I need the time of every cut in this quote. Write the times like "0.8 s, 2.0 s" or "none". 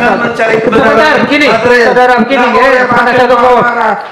none